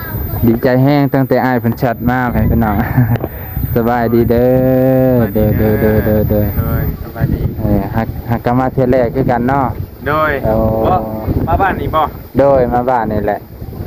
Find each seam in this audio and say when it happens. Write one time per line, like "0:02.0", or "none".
none